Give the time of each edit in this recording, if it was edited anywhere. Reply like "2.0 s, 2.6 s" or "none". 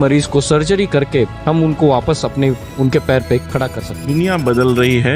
3.9 s